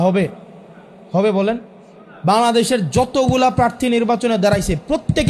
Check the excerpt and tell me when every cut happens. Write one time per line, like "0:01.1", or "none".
none